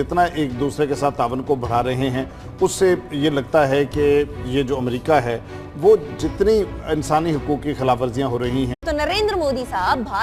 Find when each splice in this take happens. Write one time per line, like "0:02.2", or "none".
none